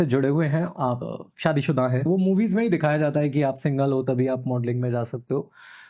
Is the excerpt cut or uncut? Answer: cut